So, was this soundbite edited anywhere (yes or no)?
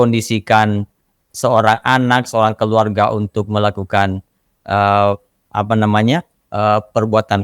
no